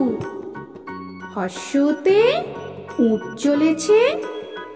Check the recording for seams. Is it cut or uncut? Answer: uncut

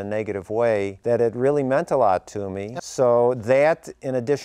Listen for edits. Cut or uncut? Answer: cut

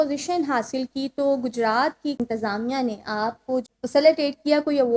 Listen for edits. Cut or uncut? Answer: cut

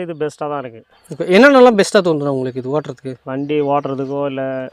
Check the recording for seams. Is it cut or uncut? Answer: uncut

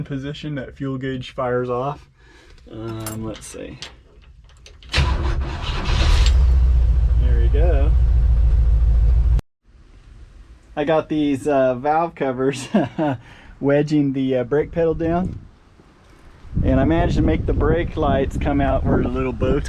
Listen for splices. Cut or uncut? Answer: cut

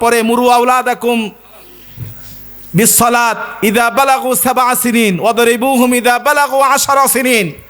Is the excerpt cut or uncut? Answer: uncut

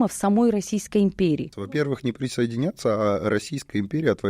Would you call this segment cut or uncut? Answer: cut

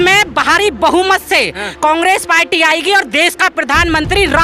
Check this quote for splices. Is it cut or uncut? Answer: uncut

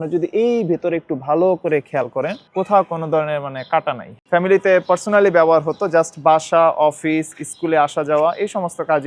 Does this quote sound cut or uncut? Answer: cut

